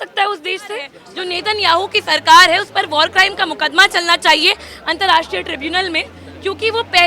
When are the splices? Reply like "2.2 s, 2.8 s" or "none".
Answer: 1.0 s